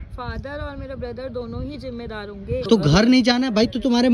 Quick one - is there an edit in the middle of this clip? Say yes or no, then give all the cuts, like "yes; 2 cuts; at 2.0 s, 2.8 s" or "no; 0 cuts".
yes; 1 cut; at 2.6 s